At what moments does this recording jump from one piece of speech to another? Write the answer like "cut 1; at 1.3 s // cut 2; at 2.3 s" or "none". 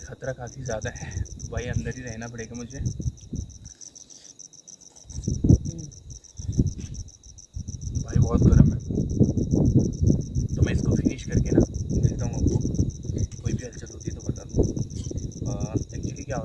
none